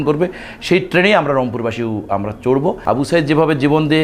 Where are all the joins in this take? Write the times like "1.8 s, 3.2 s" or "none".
2.8 s